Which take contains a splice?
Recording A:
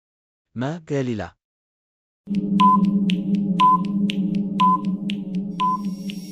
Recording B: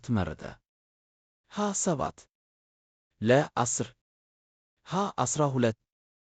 A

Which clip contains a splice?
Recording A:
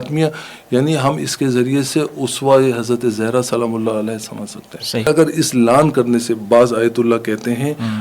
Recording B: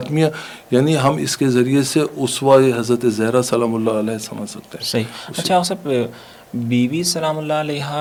A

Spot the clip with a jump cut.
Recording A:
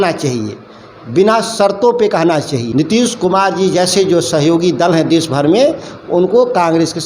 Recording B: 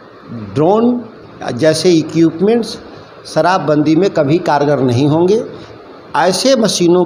A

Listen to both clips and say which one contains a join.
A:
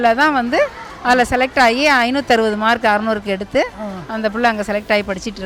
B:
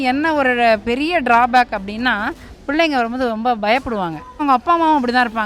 B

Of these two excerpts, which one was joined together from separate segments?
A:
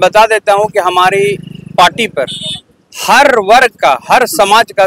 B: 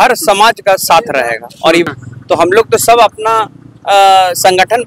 B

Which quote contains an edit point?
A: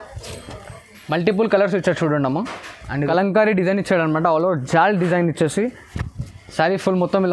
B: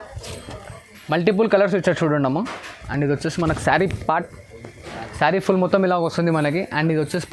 A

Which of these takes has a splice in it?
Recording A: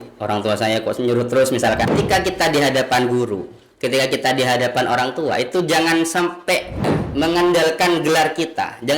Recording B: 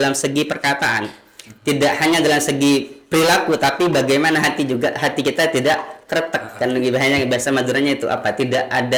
A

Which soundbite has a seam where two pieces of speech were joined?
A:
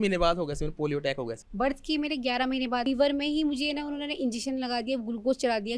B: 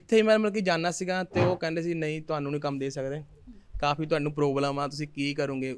A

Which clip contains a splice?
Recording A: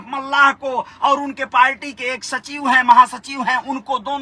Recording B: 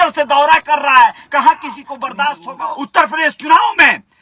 B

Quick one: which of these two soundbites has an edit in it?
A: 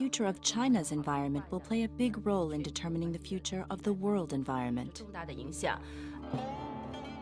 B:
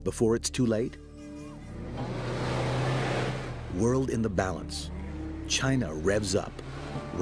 A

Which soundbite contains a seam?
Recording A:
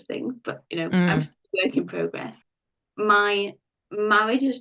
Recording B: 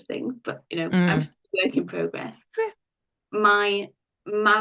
A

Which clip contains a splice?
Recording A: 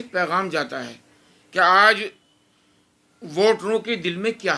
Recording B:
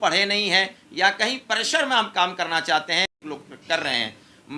B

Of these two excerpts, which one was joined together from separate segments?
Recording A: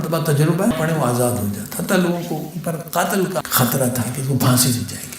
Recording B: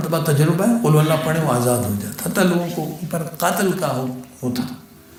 A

